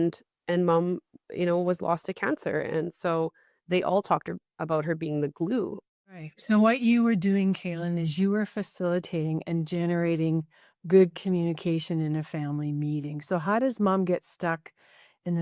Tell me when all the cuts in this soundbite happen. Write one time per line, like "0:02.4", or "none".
0:06.2